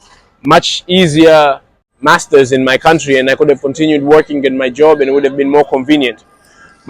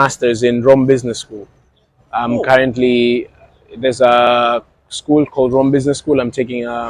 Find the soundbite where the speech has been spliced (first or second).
first